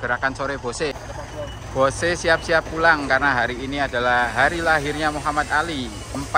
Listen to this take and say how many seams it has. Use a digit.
1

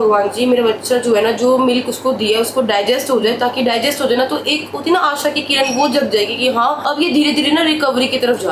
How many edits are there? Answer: 0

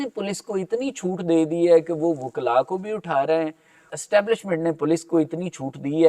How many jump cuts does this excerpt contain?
1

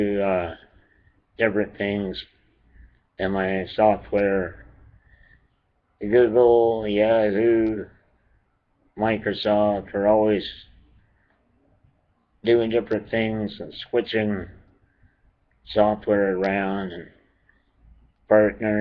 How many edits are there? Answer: 1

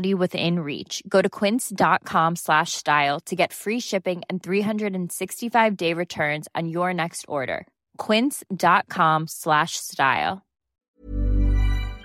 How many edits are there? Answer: 1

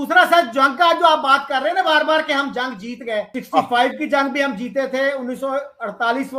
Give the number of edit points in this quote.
1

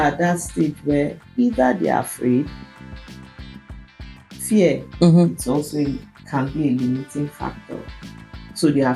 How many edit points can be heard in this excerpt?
0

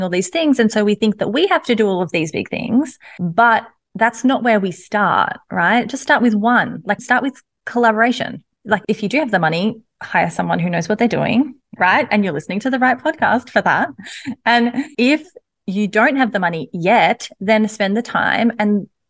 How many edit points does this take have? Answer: 0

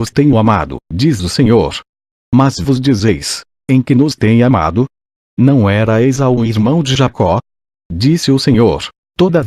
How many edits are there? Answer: 1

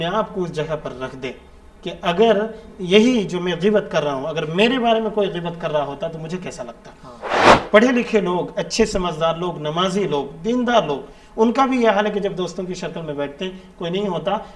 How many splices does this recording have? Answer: 1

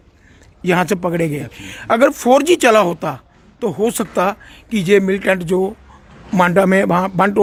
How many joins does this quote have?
0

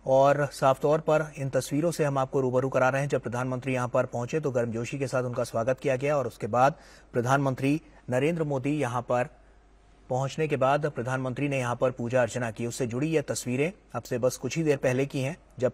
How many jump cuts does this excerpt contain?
0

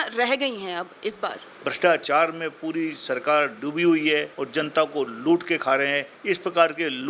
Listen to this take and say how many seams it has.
3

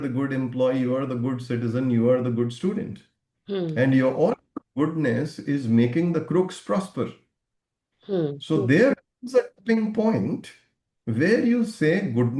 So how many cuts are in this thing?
0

